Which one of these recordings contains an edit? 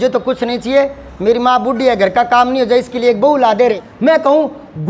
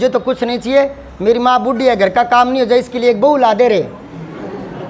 first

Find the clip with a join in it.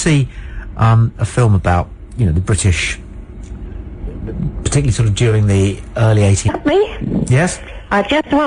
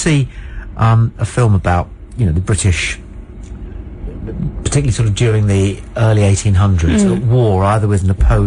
second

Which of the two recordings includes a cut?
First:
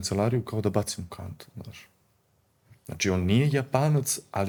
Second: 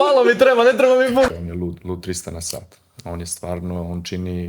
second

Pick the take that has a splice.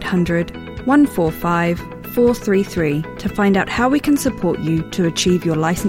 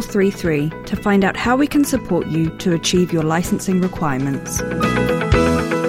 second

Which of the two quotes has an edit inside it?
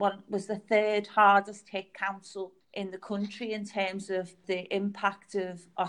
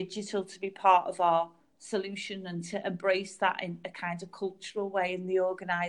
first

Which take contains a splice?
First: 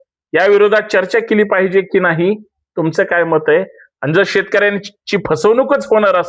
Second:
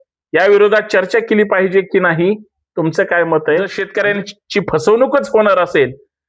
second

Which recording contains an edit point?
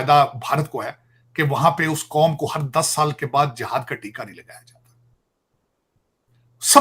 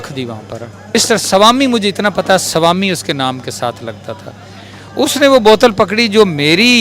second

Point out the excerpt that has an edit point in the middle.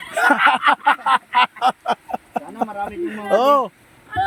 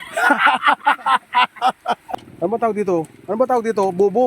second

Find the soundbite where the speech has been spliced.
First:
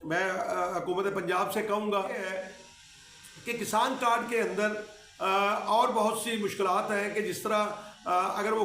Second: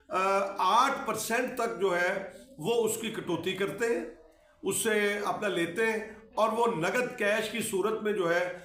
first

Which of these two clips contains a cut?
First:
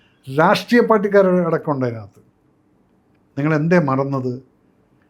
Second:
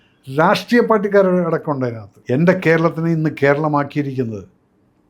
second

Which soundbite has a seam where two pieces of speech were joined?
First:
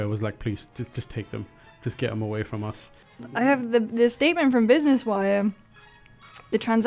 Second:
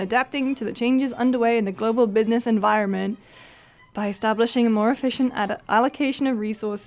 first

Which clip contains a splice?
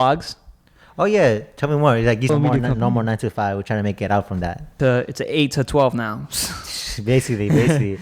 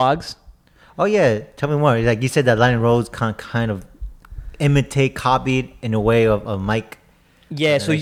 first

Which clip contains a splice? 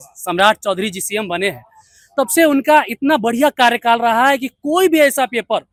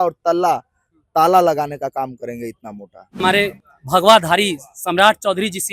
second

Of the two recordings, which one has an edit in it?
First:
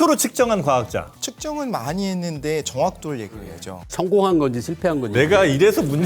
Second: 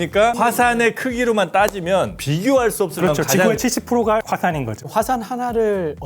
second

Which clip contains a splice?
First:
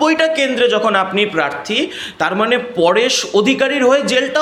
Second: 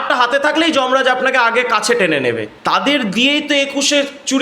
second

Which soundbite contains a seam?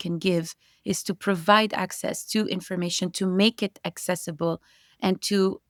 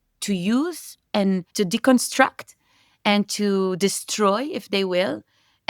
second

